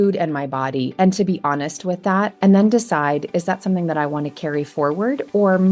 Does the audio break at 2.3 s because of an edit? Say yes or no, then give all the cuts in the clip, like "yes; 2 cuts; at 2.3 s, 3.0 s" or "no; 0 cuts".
yes; 1 cut; at 2.3 s